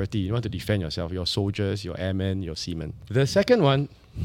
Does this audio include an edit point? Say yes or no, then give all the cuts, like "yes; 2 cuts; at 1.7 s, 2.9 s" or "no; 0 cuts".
yes; 1 cut; at 3.0 s